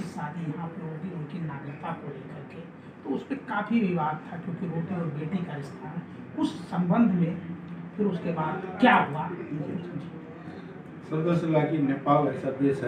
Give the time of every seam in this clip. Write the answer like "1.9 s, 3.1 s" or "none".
none